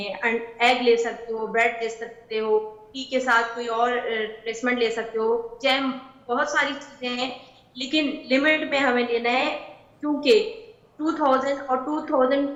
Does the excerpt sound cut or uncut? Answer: uncut